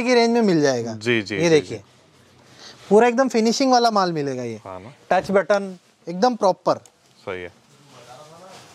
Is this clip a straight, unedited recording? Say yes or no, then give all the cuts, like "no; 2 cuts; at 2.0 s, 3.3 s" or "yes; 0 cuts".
yes; 0 cuts